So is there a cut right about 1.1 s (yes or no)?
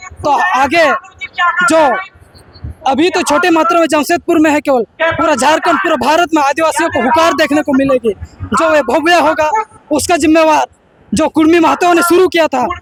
no